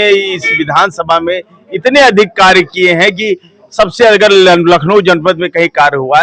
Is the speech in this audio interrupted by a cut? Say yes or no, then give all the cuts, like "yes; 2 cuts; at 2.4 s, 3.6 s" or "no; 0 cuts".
no; 0 cuts